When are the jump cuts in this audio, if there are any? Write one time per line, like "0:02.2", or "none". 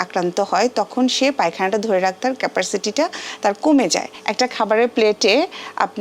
0:04.2